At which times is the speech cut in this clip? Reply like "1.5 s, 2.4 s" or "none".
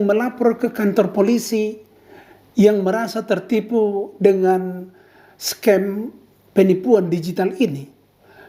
none